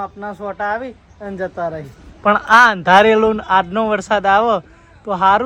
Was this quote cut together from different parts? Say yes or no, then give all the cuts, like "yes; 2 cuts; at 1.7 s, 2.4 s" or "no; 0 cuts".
no; 0 cuts